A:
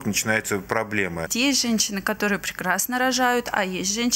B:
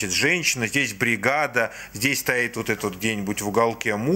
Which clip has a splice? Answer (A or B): A